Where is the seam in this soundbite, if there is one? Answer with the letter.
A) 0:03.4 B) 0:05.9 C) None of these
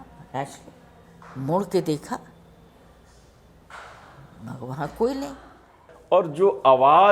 B